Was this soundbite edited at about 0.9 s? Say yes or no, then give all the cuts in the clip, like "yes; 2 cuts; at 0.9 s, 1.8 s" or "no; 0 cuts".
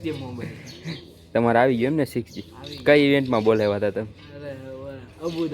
yes; 1 cut; at 0.9 s